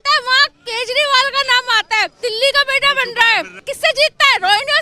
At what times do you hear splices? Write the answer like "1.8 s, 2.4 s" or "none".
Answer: 2.1 s, 3.6 s